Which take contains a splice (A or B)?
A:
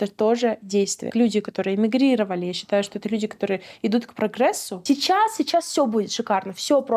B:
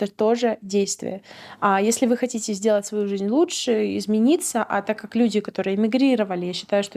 A